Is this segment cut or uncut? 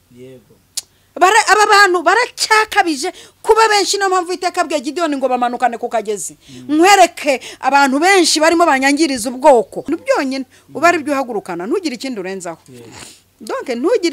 cut